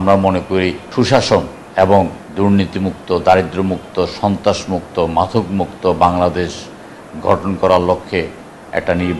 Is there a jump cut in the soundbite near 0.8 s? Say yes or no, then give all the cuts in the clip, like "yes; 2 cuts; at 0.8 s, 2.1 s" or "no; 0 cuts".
yes; 3 cuts; at 0.8 s, 1.6 s, 2.2 s